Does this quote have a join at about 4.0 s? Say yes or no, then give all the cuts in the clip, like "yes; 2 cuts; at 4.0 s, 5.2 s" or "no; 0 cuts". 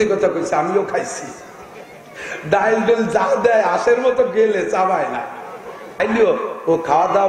no; 1 cut; at 6.0 s